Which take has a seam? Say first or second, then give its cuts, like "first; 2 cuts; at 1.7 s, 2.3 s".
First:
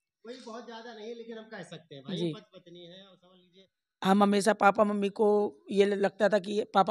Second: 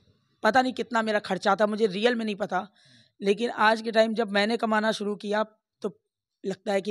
first; 1 cut; at 3.3 s